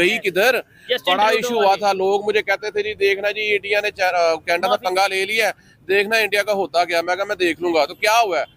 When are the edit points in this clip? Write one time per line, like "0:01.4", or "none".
none